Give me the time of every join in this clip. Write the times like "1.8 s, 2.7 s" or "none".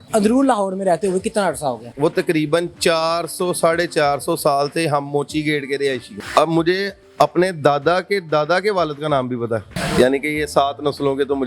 1.9 s, 6.1 s, 9.7 s

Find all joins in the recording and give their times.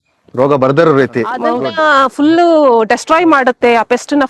1.5 s

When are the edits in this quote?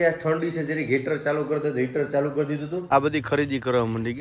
2.7 s

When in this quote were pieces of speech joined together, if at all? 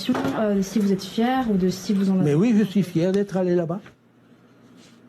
none

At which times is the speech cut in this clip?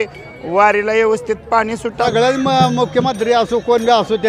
2.0 s

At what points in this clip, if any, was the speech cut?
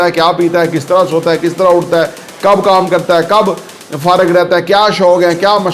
none

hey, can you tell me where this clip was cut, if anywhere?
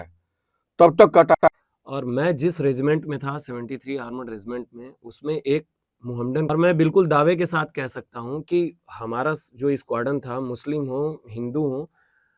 1.3 s, 6.5 s

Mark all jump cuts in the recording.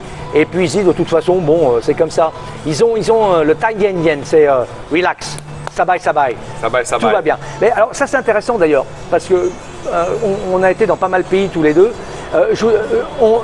none

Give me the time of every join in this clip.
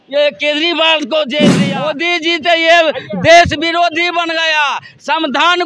1.6 s

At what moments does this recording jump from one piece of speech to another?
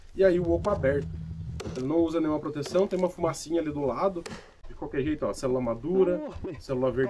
4.6 s

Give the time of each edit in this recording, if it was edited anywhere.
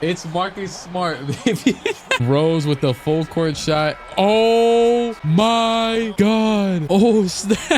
2.1 s, 5.2 s, 6.1 s

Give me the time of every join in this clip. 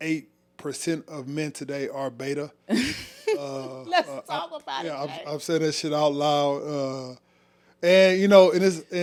none

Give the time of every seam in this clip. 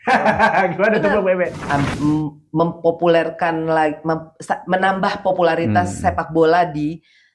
1.6 s

